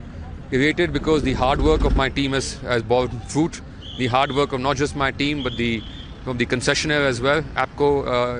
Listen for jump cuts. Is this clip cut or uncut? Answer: uncut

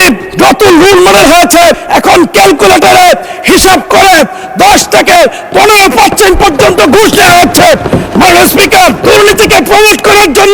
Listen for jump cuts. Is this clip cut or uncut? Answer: uncut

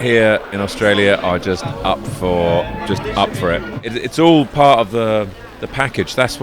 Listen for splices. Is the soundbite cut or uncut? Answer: cut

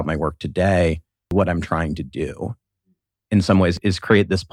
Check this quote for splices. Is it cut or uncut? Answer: cut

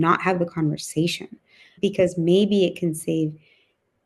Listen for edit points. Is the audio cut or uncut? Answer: cut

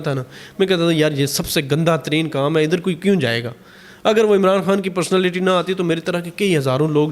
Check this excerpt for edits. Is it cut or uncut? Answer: uncut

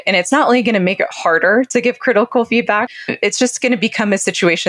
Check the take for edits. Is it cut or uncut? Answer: cut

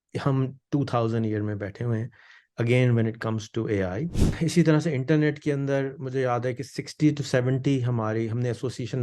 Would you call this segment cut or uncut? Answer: cut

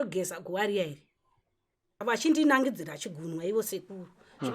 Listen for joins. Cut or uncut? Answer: cut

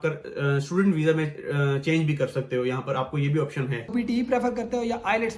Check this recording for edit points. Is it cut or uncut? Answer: cut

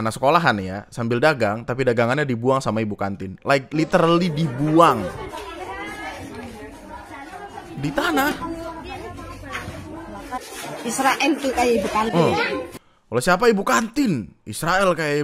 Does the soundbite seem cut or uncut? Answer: cut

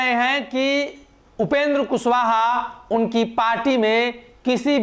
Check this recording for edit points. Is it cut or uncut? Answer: uncut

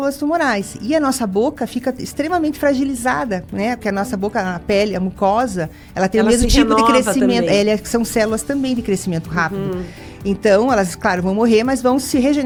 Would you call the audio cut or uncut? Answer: uncut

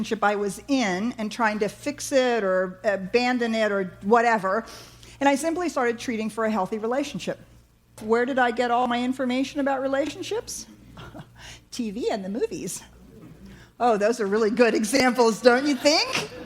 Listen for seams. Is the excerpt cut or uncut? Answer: cut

